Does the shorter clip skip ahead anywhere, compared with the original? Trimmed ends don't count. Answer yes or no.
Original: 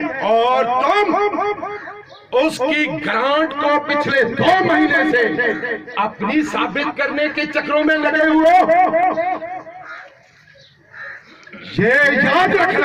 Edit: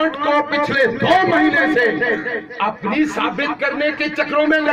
no